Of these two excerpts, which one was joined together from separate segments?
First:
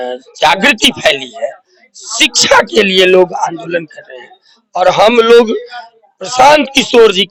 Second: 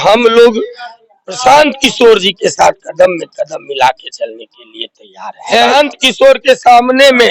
second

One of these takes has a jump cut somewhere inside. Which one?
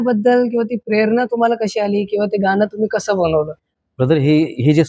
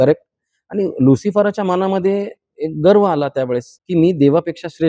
second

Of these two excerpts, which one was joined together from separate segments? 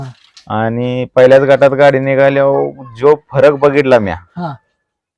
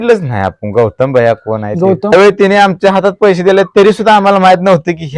second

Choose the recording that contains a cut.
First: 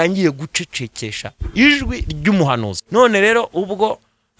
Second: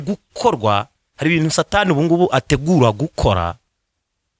first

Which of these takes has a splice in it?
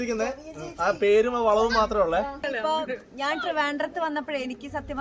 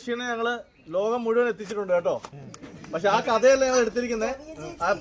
first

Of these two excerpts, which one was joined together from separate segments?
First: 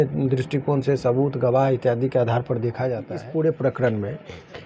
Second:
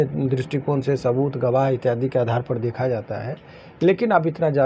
first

